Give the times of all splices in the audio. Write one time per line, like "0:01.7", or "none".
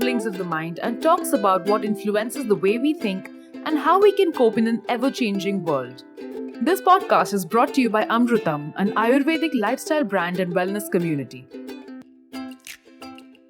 0:11.3

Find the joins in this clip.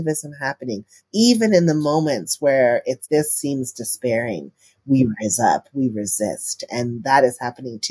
0:01.0

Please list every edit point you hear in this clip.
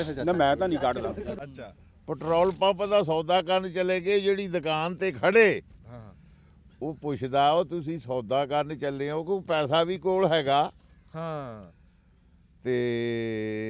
0:01.3

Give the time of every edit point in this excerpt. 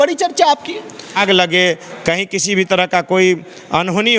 0:01.2

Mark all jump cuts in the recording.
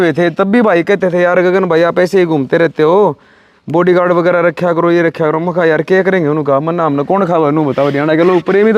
none

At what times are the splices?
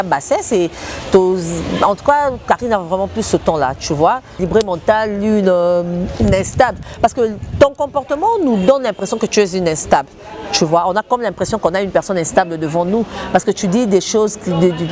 0:04.3

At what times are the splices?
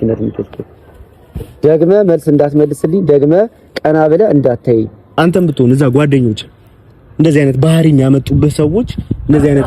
0:05.2

